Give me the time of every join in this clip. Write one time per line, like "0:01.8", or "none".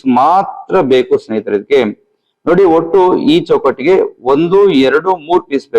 none